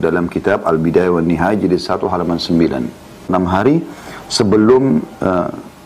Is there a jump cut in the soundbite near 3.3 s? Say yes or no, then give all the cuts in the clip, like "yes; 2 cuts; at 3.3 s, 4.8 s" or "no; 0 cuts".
yes; 1 cut; at 3.3 s